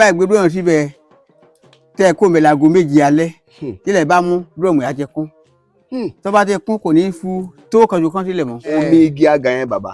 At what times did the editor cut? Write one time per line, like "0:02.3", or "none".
0:08.8